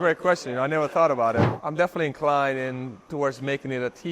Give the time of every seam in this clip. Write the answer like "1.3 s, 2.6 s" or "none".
1.6 s